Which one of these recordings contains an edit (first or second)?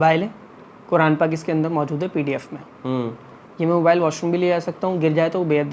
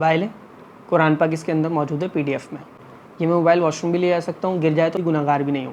second